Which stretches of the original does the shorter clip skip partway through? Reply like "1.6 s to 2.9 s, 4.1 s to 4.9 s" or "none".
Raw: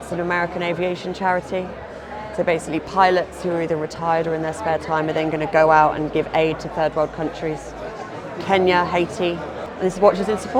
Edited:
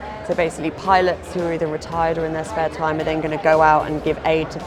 none